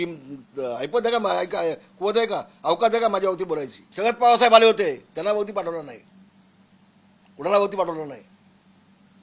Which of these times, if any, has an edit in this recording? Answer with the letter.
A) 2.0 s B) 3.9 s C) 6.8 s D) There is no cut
B